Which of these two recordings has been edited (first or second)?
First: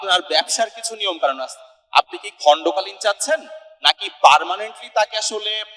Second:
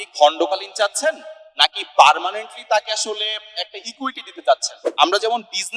second